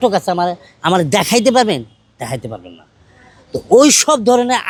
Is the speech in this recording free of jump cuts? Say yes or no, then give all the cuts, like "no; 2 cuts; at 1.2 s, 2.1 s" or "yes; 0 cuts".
yes; 0 cuts